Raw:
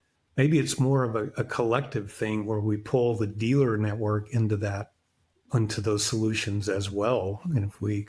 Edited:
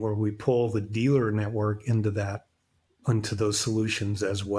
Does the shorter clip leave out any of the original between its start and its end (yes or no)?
no